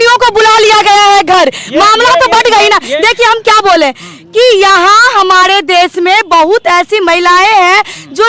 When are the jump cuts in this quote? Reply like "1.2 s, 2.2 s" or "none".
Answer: none